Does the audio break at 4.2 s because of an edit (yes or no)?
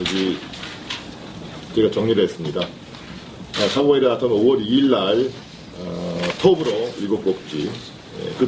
no